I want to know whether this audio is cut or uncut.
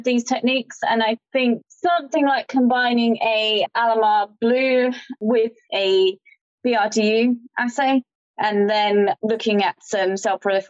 cut